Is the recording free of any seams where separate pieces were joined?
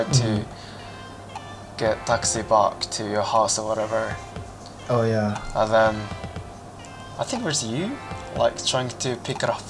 yes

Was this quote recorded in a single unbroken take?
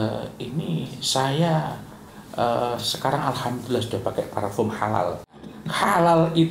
no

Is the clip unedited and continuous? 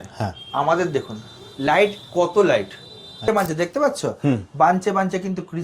no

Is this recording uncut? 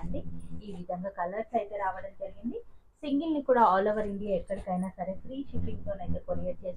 yes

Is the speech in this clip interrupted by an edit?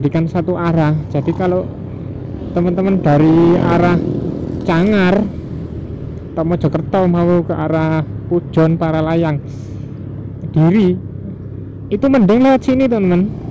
no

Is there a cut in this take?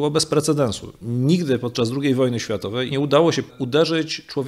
yes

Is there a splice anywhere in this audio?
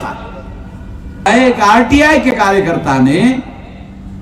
yes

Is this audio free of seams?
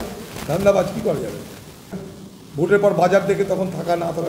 no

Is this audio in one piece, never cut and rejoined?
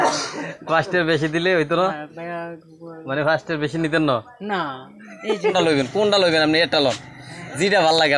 no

